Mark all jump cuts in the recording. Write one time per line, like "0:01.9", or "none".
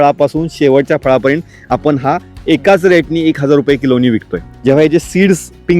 0:04.5